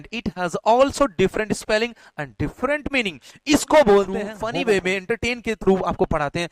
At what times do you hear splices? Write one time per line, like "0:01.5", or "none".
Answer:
0:04.4

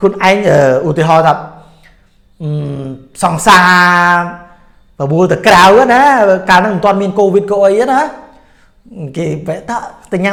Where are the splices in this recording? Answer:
none

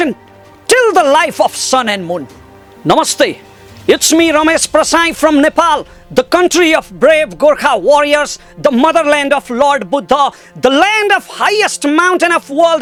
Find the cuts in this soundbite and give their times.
none

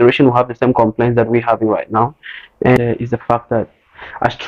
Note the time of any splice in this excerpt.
0:02.8

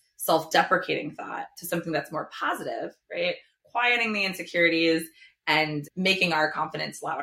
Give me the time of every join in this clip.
0:05.8

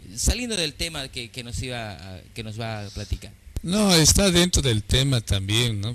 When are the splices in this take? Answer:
0:04.5

